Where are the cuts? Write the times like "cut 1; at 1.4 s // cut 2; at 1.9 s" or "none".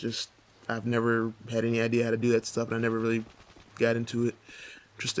none